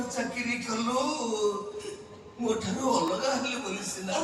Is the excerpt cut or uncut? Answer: uncut